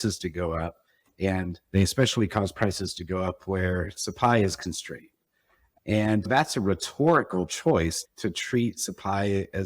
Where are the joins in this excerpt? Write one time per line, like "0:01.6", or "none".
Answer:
0:06.3
0:08.0